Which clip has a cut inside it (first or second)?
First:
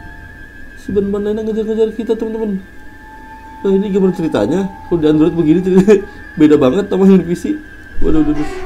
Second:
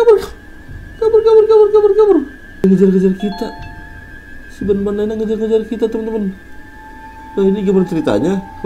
second